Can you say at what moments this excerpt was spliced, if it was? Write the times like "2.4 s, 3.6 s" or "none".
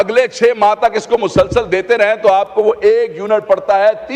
none